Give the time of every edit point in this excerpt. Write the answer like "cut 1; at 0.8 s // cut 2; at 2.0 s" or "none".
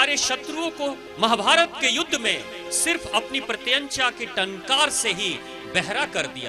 cut 1; at 1.1 s